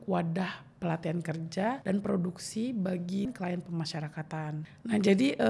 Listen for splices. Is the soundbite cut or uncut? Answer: cut